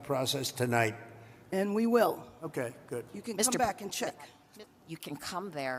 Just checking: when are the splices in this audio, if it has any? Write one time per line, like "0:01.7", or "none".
0:04.4